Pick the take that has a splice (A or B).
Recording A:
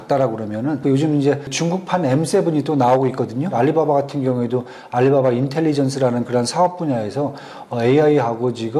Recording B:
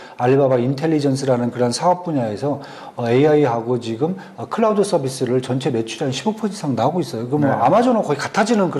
A